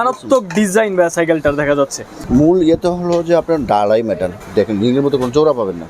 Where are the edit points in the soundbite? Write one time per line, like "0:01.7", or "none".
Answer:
0:02.1
0:04.3